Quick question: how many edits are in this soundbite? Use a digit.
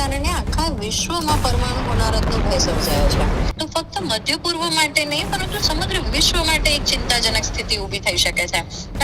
1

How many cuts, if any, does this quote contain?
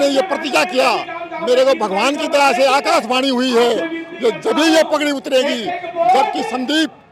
0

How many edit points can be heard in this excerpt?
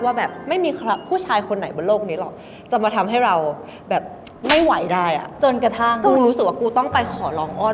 1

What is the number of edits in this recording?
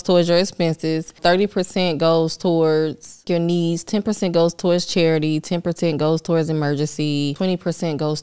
3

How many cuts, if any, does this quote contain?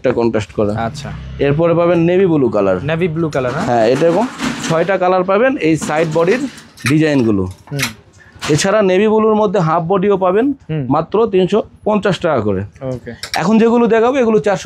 0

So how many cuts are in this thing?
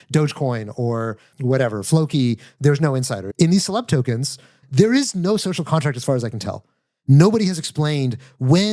3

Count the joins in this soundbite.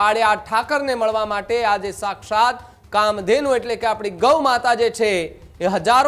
0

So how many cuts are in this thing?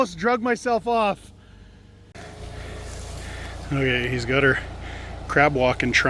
1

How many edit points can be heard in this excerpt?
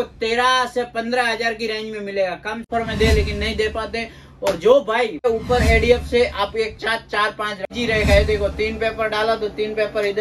3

